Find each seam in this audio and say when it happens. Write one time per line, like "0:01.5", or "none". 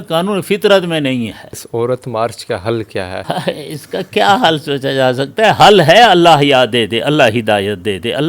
0:01.6
0:03.2